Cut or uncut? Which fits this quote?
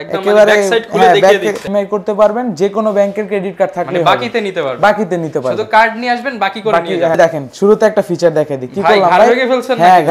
cut